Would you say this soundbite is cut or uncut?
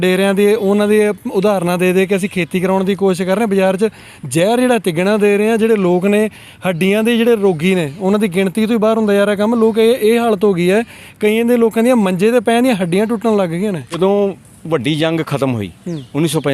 cut